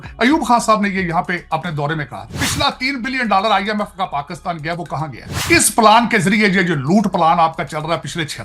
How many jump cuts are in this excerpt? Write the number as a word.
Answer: two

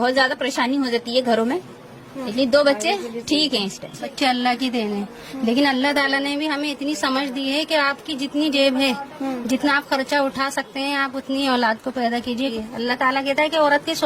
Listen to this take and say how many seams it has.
two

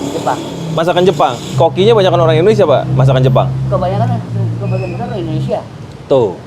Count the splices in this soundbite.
one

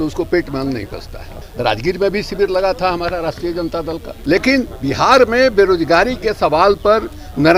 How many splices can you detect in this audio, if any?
two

